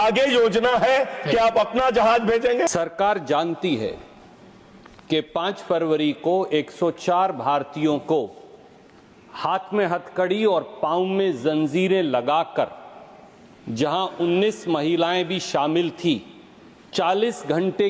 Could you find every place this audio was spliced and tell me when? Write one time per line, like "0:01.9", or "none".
0:02.7